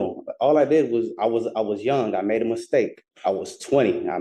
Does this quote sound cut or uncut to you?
cut